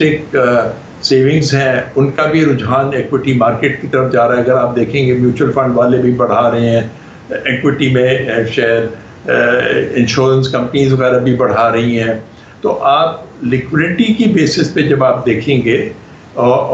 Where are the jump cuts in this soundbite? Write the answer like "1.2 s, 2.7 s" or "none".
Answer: none